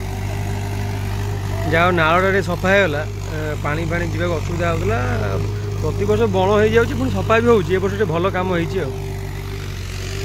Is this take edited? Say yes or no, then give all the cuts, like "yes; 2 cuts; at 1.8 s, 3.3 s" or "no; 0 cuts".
no; 0 cuts